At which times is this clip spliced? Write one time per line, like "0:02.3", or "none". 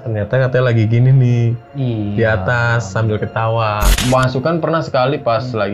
0:03.9